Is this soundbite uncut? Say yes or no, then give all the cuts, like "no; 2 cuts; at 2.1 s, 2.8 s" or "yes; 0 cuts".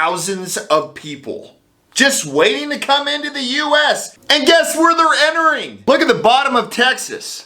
no; 1 cut; at 4.1 s